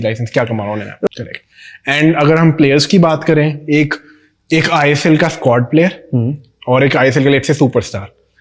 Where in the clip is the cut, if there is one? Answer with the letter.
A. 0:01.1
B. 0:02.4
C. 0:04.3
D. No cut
A